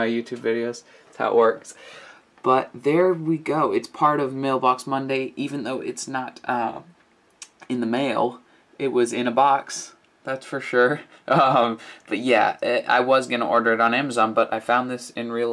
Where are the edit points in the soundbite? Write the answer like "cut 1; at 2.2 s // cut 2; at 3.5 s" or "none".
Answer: cut 1; at 2.7 s